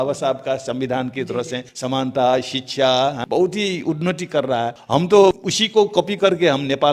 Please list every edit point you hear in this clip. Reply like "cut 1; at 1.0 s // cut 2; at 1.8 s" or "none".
cut 1; at 1.7 s // cut 2; at 3.2 s // cut 3; at 4.8 s // cut 4; at 5.5 s